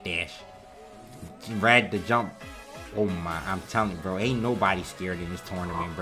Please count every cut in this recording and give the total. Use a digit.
0